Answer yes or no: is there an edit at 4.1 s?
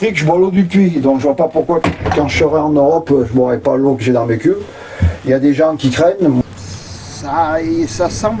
no